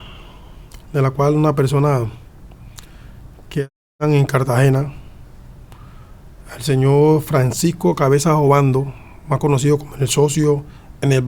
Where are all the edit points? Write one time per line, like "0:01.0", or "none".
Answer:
none

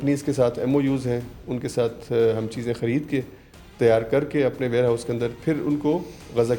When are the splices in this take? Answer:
none

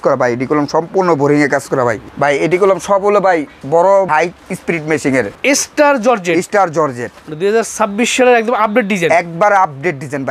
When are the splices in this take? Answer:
0:02.1
0:04.1
0:05.3

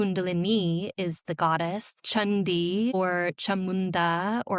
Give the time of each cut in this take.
0:01.9
0:02.9

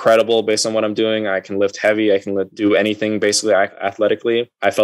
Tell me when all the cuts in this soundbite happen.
0:02.5
0:03.8

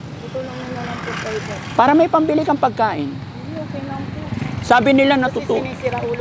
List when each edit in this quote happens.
none

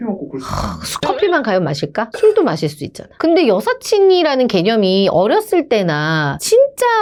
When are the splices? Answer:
none

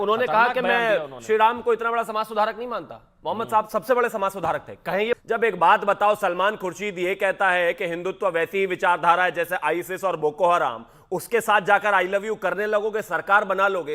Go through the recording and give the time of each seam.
0:05.2

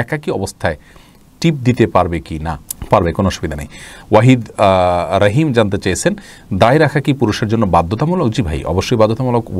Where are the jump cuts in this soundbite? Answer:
none

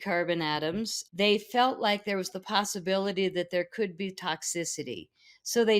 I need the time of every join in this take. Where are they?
0:01.0

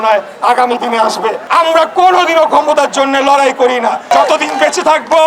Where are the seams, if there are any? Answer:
0:01.4
0:04.1

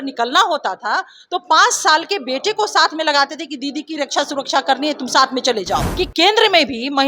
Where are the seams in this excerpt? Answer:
0:05.9

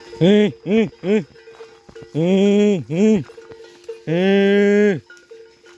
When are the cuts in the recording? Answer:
none

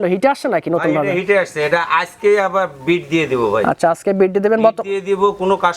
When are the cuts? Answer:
none

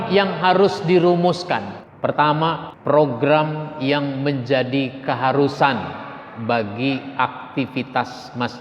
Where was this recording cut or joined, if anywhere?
0:01.8
0:02.7

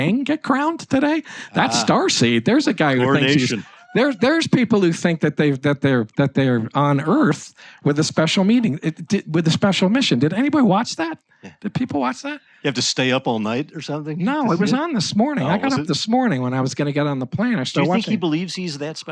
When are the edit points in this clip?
none

